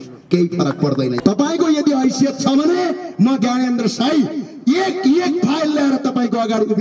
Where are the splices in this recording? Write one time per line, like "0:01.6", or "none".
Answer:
0:01.2